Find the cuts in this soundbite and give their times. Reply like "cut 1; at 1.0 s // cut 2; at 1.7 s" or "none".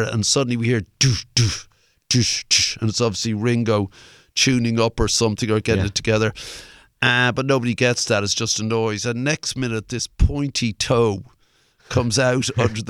none

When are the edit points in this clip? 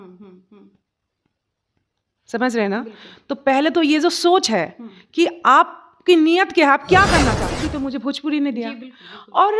cut 1; at 7.4 s

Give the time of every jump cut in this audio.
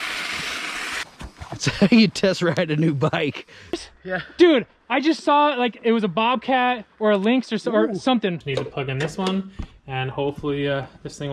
cut 1; at 1.0 s // cut 2; at 3.7 s // cut 3; at 8.4 s

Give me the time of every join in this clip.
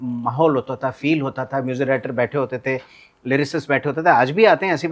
none

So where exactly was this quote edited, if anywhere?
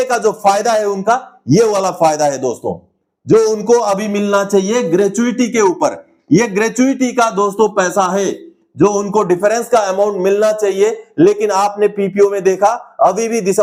none

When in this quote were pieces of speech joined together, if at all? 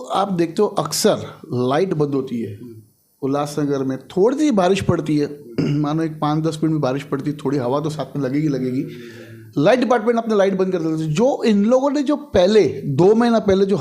none

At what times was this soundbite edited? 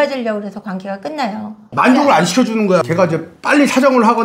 cut 1; at 1.6 s // cut 2; at 2.9 s

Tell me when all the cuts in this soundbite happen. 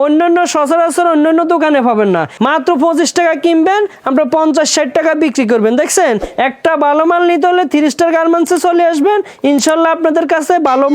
cut 1; at 2.3 s // cut 2; at 6.3 s

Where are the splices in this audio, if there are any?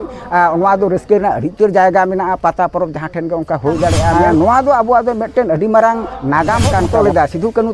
cut 1; at 4.1 s // cut 2; at 6.9 s

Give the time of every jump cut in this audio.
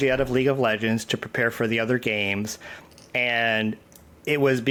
none

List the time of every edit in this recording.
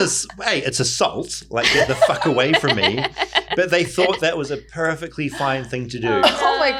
none

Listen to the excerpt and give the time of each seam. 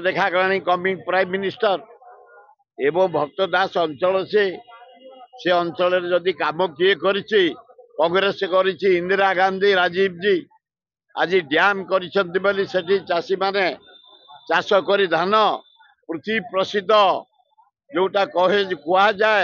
none

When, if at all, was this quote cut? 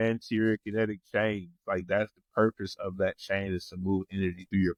none

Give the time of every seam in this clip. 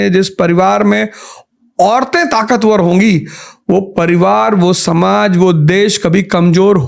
none

